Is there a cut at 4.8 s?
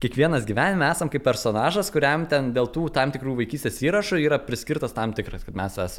no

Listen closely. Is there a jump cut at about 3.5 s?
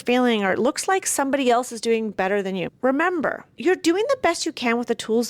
yes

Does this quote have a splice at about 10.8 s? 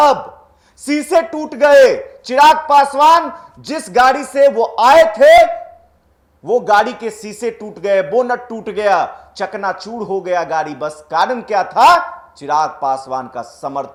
no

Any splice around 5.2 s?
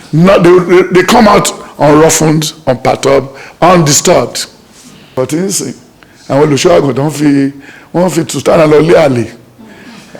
yes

